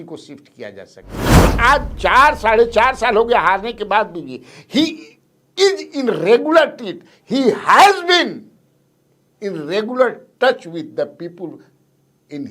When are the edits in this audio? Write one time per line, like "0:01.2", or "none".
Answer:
0:01.4